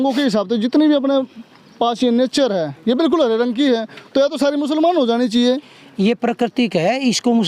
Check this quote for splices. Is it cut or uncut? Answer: uncut